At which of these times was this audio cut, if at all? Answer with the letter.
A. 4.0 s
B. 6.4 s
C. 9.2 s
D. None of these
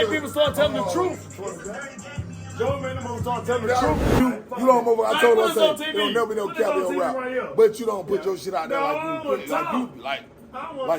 A